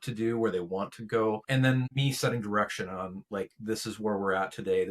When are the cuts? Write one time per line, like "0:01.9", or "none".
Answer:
0:01.7

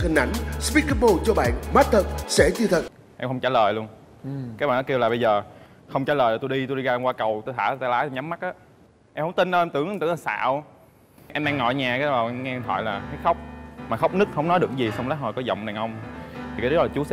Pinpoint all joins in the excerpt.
0:03.0

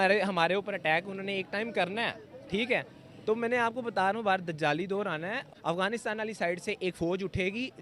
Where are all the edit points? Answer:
0:05.4

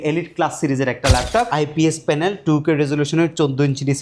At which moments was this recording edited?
0:01.5

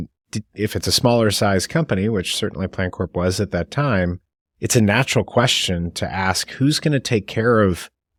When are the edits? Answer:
none

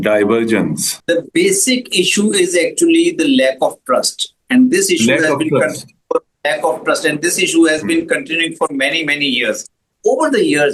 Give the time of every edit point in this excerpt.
0:00.9
0:09.8

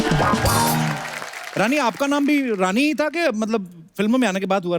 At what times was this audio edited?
none

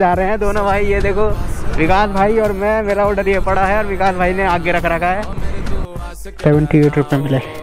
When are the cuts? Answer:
0:05.7

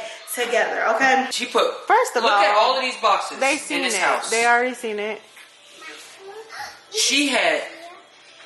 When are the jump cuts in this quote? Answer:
0:01.4

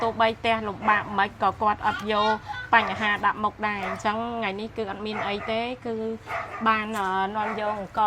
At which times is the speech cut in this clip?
none

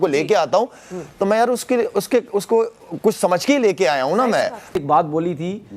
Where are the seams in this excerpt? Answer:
0:04.7

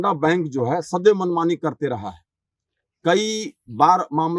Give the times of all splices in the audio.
none

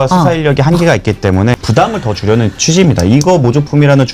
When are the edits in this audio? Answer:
0:01.6

